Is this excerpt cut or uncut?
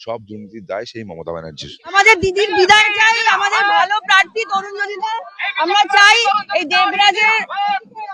cut